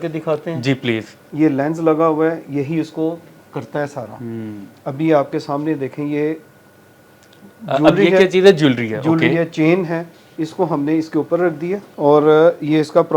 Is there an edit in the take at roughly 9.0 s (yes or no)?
no